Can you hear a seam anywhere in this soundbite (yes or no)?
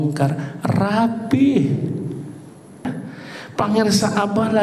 yes